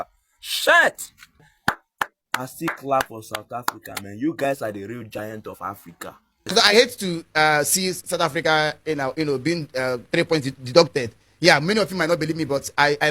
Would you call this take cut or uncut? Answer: cut